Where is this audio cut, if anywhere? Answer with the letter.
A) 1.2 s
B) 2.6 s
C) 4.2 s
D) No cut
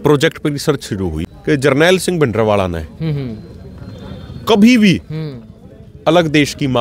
A